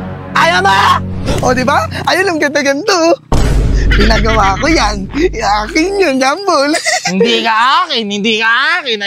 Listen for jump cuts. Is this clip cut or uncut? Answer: uncut